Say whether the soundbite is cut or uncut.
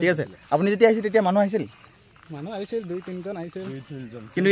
uncut